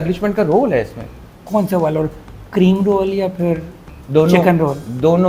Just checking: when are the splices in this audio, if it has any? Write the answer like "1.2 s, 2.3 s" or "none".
1.3 s